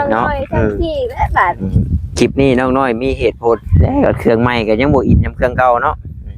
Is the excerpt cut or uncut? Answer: cut